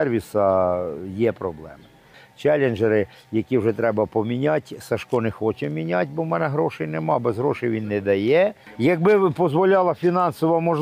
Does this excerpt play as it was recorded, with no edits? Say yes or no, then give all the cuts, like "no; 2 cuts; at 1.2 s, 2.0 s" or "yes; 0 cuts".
no; 2 cuts; at 2.2 s, 8.6 s